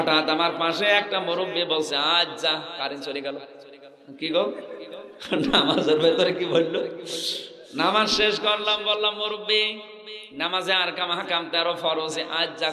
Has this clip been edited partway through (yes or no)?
no